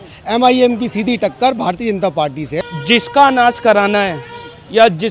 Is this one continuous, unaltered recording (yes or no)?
no